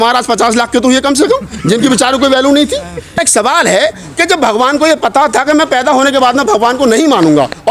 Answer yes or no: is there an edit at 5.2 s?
no